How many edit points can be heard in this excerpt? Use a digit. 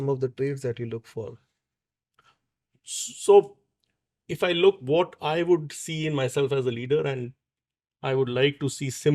0